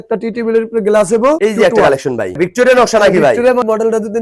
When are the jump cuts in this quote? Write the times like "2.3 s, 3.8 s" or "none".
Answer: 1.4 s, 2.3 s